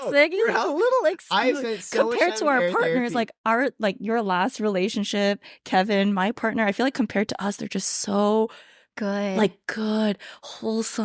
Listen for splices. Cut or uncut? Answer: uncut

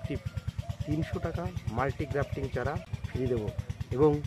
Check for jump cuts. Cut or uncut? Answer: cut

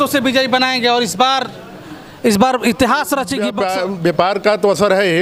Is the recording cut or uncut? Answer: cut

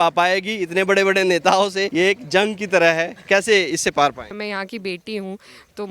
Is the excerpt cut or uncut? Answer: cut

